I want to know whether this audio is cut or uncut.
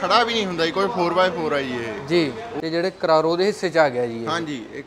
cut